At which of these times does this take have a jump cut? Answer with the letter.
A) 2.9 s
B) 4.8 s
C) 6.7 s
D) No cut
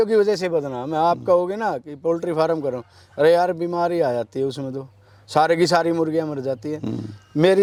D